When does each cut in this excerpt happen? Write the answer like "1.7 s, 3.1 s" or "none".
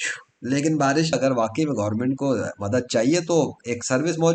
1.1 s